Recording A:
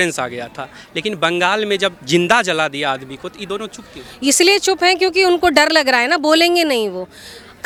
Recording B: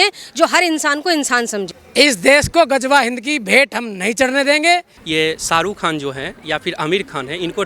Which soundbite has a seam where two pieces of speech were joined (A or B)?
B